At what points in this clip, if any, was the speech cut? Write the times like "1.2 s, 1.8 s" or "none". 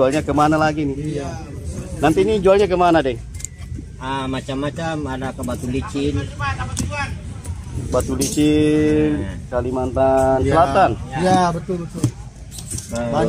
none